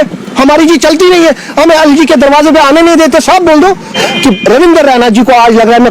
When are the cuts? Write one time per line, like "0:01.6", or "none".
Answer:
0:04.0